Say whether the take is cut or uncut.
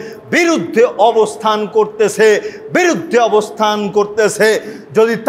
uncut